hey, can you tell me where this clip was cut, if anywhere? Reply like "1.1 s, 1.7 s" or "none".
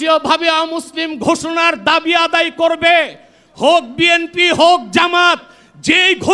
none